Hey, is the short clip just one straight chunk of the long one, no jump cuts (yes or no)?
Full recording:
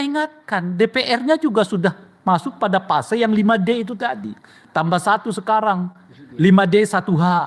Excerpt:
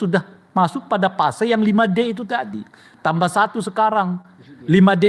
yes